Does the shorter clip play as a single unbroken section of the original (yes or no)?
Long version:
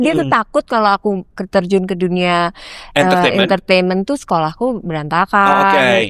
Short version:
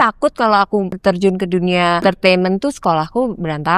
no